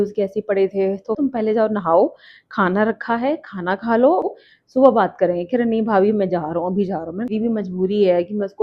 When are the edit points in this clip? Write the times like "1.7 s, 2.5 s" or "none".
1.2 s, 4.3 s, 7.3 s